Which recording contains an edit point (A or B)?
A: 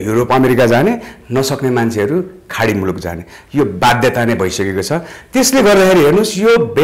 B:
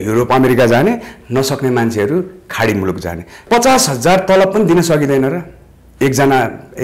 B